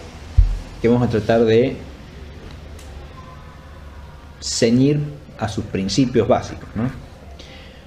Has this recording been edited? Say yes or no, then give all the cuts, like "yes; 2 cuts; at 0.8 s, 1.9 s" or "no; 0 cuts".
yes; 1 cut; at 2.6 s